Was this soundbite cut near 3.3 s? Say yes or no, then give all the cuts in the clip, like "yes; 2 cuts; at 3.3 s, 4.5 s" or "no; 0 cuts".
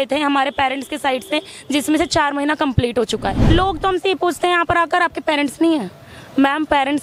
yes; 1 cut; at 3.3 s